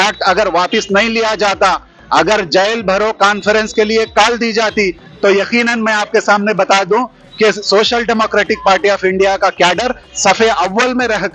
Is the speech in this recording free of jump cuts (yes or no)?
yes